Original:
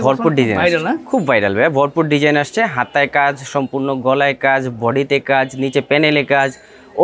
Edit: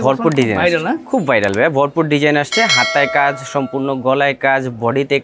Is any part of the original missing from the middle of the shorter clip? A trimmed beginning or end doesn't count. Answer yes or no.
no